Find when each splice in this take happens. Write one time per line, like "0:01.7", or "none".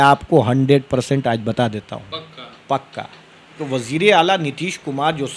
0:03.6